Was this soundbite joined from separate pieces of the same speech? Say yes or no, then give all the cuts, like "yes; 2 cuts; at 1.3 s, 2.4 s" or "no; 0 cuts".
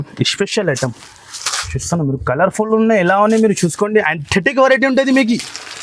no; 0 cuts